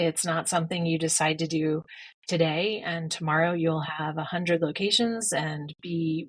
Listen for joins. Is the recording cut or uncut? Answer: uncut